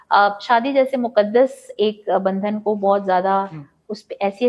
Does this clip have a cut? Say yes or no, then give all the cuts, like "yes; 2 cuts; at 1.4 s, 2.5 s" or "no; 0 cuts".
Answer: no; 0 cuts